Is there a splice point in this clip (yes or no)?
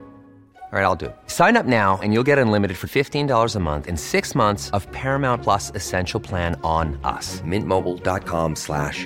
no